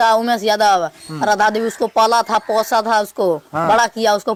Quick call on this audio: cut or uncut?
uncut